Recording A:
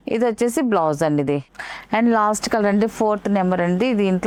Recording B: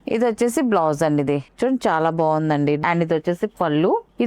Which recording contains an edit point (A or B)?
B